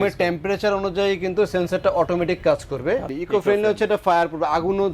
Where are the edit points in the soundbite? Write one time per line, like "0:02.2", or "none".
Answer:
0:03.2